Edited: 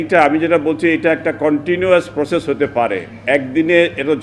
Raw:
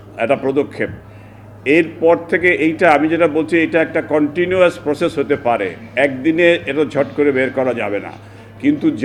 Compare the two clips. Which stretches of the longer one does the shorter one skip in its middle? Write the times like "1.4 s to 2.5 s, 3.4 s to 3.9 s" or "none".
none